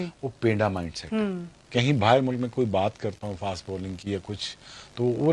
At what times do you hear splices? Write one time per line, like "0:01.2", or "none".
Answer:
0:01.7